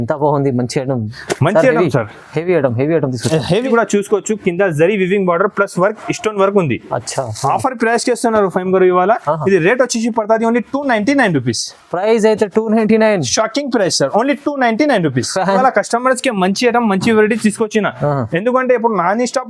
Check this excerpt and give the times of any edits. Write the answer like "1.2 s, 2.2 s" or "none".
3.7 s, 15.6 s